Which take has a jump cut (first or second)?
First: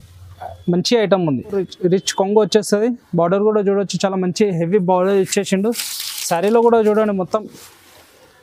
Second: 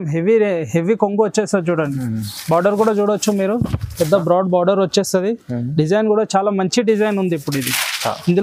first